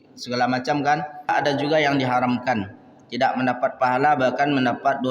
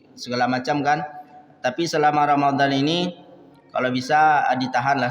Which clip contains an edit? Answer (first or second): first